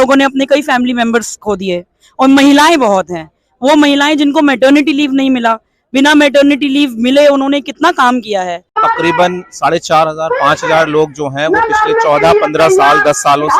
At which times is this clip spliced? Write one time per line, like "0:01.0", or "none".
0:08.8